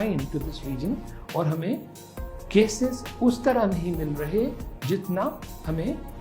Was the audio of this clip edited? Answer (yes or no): no